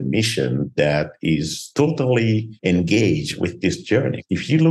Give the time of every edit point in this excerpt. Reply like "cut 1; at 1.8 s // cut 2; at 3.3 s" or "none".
cut 1; at 1.6 s // cut 2; at 2.5 s // cut 3; at 3.7 s